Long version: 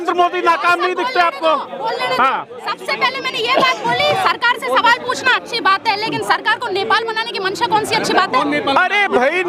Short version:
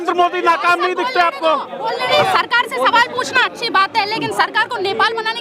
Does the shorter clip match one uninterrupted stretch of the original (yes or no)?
no